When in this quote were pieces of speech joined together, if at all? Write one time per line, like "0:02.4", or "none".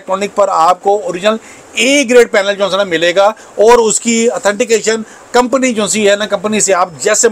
none